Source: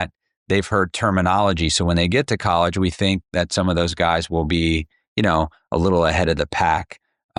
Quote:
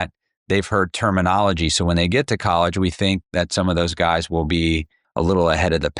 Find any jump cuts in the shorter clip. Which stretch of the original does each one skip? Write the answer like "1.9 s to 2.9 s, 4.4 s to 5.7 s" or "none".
5.0 s to 5.6 s